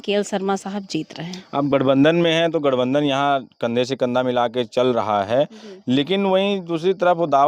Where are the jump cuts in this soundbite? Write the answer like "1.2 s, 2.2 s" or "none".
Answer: none